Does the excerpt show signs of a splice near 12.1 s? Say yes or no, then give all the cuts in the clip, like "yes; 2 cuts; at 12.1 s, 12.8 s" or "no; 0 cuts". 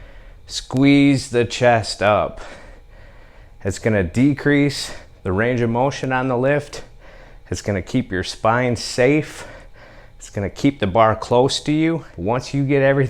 yes; 1 cut; at 12.1 s